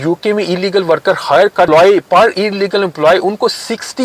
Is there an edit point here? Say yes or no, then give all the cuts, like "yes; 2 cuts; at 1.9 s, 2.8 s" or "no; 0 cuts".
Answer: yes; 1 cut; at 1.7 s